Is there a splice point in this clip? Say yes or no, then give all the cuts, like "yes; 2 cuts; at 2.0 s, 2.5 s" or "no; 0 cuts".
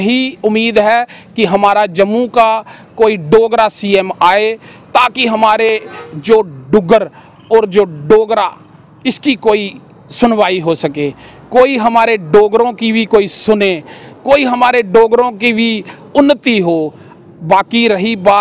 no; 0 cuts